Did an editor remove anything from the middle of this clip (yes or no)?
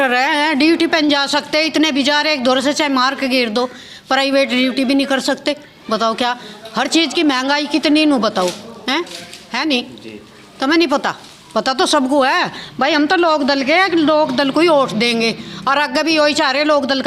no